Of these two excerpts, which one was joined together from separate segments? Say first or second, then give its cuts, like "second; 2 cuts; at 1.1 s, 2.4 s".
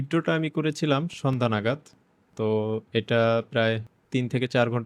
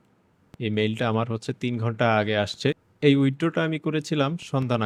first; 1 cut; at 3.9 s